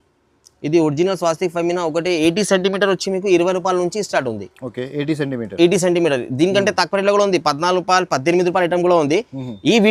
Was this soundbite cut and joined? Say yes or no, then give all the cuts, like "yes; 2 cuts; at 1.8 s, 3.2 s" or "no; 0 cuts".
no; 0 cuts